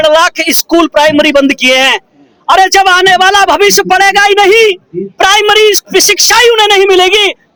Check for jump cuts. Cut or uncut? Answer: uncut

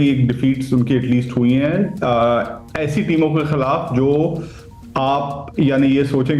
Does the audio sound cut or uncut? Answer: uncut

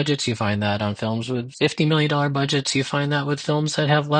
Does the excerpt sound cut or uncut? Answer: cut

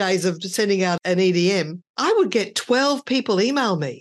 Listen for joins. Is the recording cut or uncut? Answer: cut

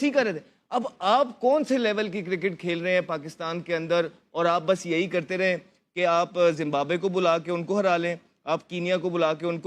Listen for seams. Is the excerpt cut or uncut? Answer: uncut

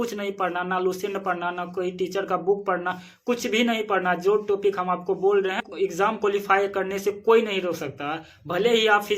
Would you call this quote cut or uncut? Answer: cut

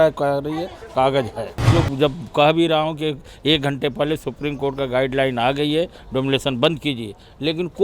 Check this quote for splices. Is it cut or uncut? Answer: cut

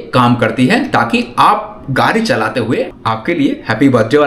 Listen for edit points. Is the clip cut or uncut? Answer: cut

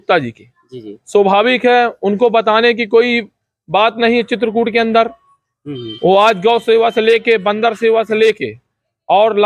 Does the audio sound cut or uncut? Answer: uncut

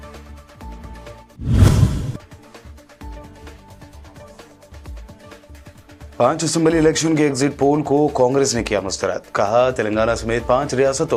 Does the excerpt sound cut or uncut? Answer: uncut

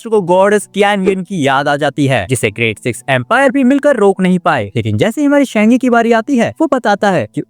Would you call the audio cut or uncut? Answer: uncut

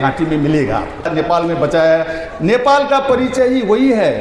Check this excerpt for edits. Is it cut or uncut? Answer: cut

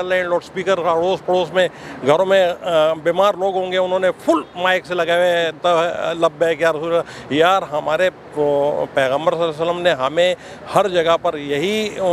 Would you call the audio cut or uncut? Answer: uncut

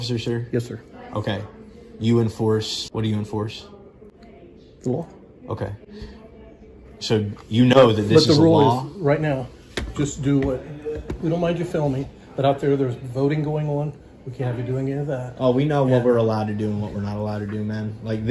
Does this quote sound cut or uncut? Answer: cut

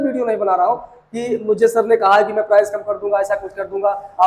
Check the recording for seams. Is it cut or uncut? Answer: uncut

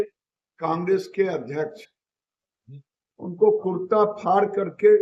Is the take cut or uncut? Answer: uncut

